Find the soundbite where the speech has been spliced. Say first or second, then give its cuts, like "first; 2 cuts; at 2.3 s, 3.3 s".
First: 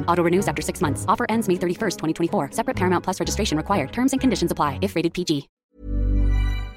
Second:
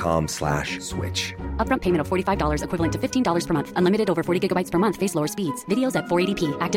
first; 1 cut; at 5.6 s